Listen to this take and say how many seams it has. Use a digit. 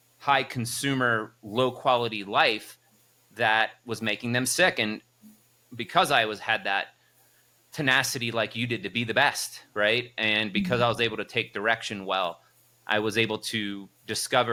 0